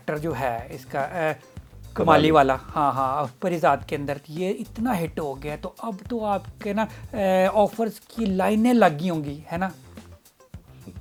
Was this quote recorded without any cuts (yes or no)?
yes